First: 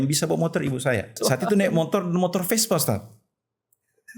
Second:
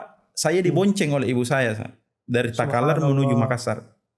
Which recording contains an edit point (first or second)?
first